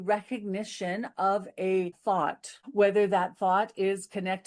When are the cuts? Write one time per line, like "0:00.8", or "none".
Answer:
0:02.2